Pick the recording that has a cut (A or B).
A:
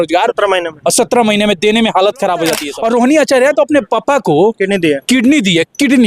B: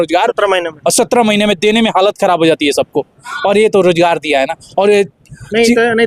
A